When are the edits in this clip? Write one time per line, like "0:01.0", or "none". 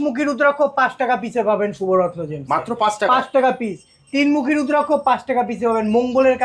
none